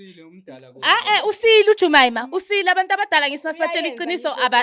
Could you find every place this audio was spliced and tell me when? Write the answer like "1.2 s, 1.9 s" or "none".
none